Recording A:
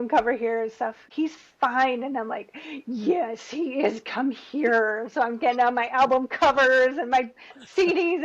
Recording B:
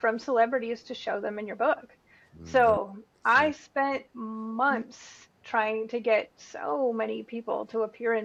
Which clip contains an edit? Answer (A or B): A